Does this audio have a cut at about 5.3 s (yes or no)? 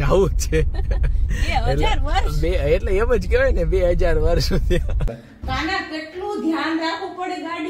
yes